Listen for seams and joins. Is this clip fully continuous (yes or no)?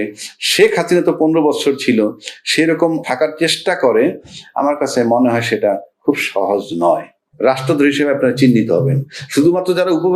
no